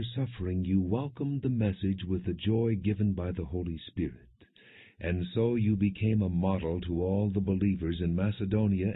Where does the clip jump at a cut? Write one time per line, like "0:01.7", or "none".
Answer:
0:07.5